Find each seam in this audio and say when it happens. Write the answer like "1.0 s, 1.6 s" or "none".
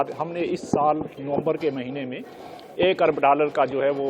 none